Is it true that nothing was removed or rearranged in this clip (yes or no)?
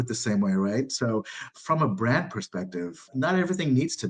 no